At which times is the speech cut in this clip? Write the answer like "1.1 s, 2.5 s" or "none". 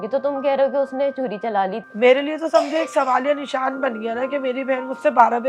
1.8 s